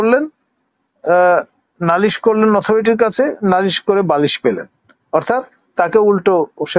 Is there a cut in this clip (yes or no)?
no